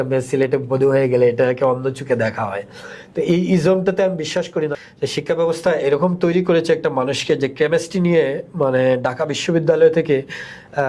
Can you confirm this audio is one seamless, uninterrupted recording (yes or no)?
no